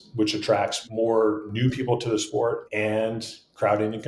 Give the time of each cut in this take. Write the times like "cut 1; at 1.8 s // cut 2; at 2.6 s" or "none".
cut 1; at 2.6 s

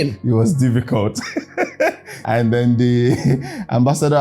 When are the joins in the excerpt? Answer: cut 1; at 2.1 s

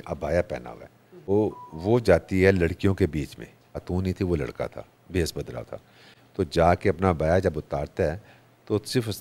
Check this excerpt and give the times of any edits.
cut 1; at 1.3 s // cut 2; at 3.8 s

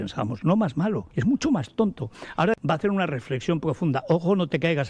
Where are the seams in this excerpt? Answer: cut 1; at 1.1 s // cut 2; at 2.6 s

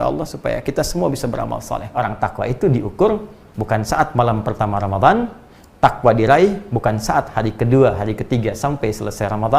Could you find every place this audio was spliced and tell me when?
cut 1; at 1.9 s

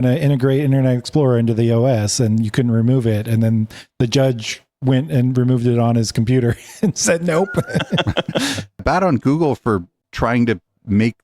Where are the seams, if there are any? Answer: cut 1; at 8.8 s

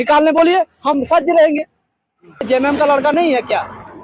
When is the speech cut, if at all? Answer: cut 1; at 2.5 s

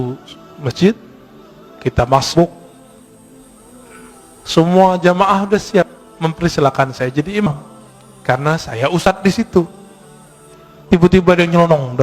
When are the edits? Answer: cut 1; at 2.8 s // cut 2; at 4.5 s

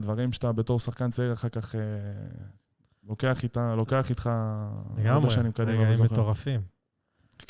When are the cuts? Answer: none

